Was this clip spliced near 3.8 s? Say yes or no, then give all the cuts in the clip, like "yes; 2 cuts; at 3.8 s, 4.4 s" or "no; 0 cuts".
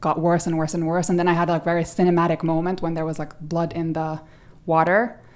no; 0 cuts